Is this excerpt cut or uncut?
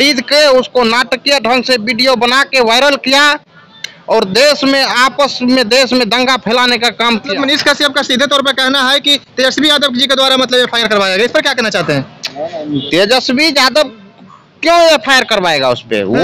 cut